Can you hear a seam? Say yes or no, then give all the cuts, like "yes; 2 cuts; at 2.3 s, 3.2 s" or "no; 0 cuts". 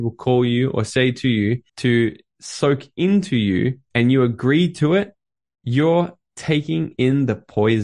yes; 2 cuts; at 1.7 s, 3.8 s